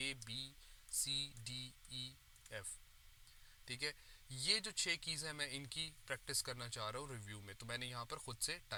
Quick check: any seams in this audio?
no; 0 cuts

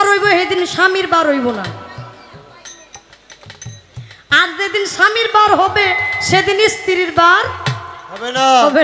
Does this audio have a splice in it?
no; 0 cuts

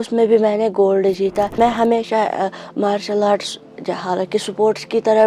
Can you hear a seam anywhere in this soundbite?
yes; 1 cut; at 1.5 s

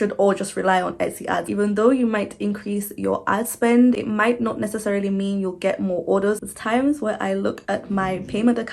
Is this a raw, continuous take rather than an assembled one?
no; 2 cuts; at 1.4 s, 6.4 s

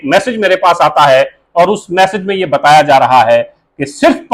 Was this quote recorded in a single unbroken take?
yes; 0 cuts

